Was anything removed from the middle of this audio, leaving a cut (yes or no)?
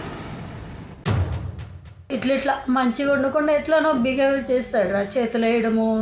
yes